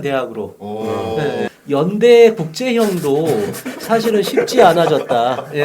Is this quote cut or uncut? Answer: cut